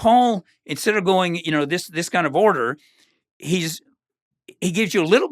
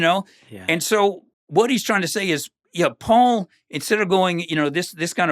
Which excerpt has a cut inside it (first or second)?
second